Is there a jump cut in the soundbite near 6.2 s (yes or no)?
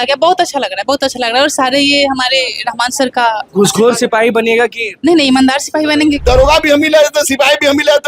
yes